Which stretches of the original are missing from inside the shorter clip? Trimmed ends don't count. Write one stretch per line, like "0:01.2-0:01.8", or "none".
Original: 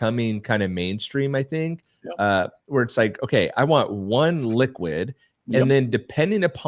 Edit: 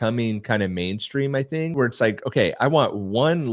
0:01.7-0:02.7